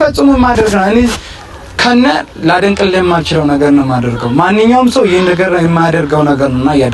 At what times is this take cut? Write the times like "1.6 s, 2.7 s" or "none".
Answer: none